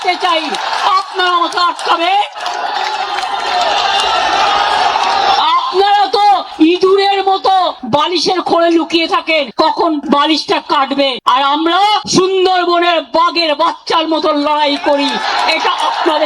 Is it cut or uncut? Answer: uncut